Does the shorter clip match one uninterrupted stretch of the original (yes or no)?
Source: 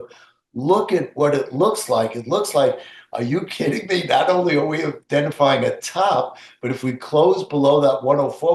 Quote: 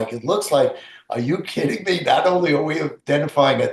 yes